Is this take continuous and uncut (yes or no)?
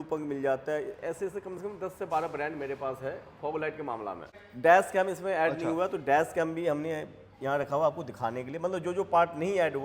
yes